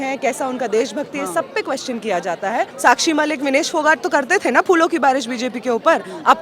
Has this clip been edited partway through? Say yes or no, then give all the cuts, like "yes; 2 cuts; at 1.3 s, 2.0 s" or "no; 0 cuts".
yes; 1 cut; at 2.7 s